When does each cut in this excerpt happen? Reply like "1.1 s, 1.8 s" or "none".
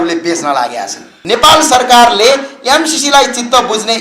1.1 s